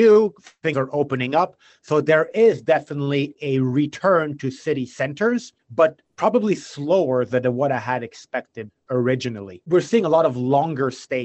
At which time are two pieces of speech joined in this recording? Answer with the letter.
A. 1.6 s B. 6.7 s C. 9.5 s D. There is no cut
C